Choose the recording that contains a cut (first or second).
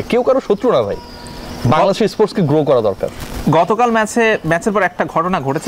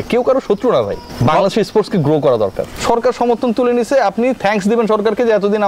second